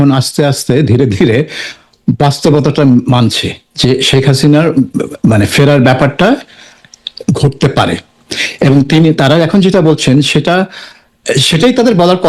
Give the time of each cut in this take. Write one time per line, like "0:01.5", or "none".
none